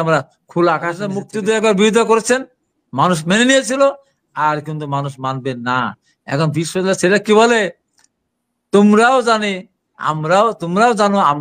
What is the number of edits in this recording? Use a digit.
1